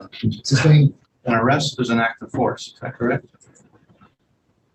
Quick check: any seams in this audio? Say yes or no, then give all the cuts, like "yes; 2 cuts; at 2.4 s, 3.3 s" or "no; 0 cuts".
no; 0 cuts